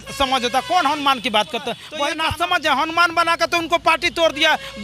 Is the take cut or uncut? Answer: cut